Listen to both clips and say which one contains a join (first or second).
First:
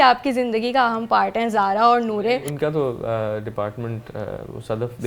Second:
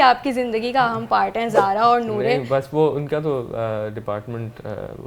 first